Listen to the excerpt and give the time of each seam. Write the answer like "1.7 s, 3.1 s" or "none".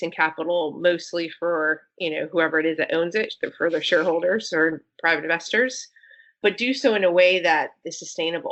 none